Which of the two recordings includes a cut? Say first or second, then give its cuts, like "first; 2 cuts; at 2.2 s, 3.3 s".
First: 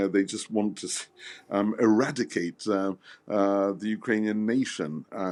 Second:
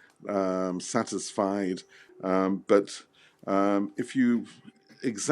second; 1 cut; at 2.0 s